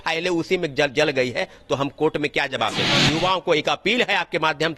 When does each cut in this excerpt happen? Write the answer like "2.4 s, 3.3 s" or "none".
2.9 s